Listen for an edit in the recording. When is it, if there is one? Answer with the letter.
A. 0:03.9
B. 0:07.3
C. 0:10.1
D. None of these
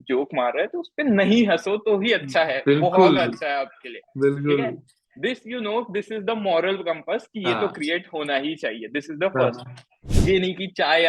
C